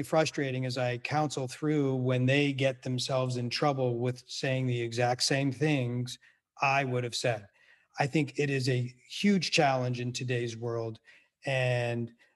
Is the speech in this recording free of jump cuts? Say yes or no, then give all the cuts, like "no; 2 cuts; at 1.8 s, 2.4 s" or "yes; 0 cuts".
yes; 0 cuts